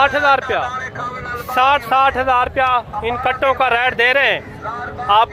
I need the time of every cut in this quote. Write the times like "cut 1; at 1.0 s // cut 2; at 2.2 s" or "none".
none